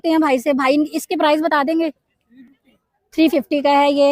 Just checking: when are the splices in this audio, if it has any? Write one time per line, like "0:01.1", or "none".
none

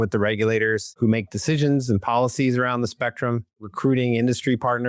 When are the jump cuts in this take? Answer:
0:00.9
0:03.6

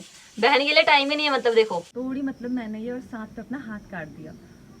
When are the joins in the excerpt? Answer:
0:01.9

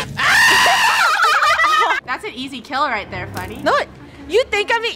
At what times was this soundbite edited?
0:02.0

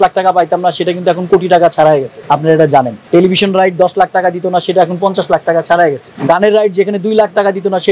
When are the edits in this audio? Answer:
0:02.7
0:06.1

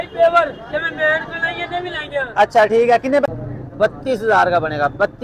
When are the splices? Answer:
0:03.2

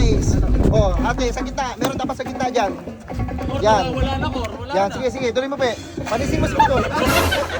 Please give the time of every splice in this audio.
none

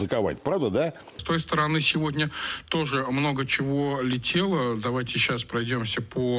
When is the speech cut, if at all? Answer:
0:01.2

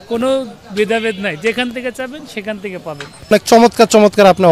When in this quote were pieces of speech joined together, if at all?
0:03.3

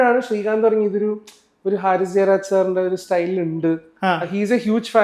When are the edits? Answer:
none

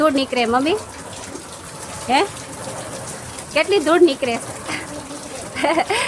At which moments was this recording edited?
none

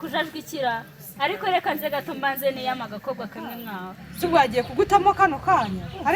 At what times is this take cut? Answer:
0:04.0

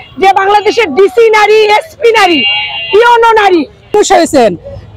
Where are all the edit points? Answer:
0:03.9

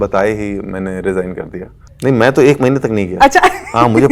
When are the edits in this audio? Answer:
0:01.9

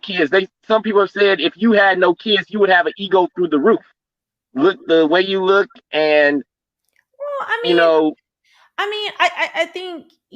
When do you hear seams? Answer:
0:04.7

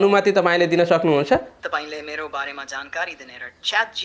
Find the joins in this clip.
0:01.5

